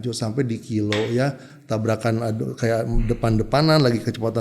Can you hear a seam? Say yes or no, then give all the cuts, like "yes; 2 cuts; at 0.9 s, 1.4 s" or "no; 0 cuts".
yes; 1 cut; at 1.5 s